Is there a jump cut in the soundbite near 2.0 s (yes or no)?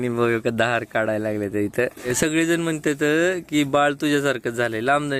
yes